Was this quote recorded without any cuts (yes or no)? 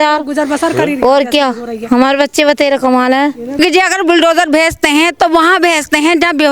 no